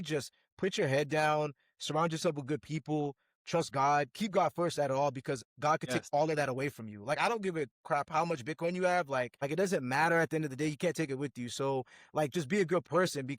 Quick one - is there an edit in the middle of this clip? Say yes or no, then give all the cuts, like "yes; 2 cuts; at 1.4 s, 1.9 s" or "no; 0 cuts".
yes; 1 cut; at 9.4 s